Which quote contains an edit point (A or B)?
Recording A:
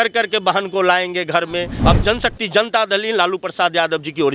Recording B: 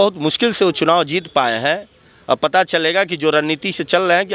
A